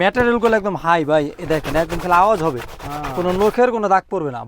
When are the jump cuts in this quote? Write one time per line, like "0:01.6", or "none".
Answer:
none